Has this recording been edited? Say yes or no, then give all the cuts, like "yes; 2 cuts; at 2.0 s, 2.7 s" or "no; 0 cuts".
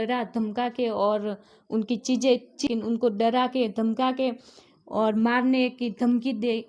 no; 0 cuts